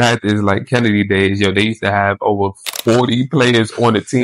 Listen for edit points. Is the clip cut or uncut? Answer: uncut